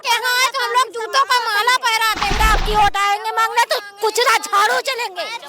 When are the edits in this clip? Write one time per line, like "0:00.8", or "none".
0:02.4

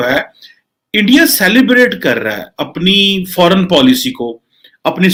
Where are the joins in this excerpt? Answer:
none

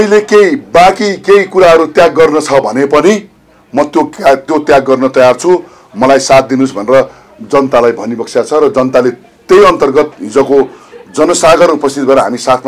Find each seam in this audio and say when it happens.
none

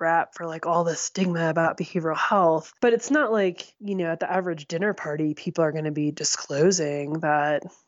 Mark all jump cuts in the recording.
0:02.7
0:03.7

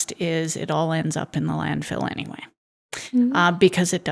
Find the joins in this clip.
none

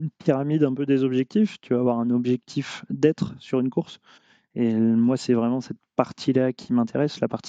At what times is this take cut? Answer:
none

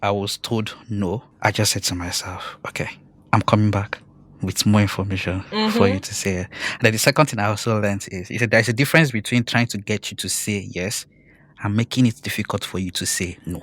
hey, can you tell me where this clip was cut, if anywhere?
0:01.3
0:03.1

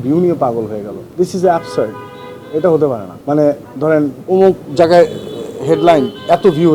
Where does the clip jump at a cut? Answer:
0:01.0
0:03.1
0:04.2

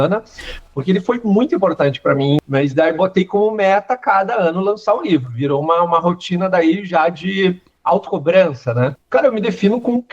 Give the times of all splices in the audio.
0:02.4
0:09.0

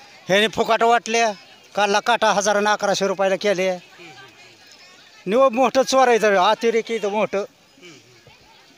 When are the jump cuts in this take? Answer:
none

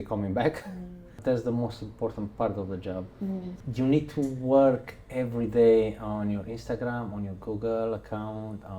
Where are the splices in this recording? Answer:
0:01.2
0:03.6

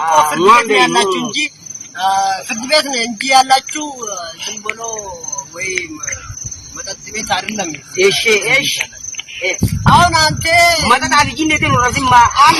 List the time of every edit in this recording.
none

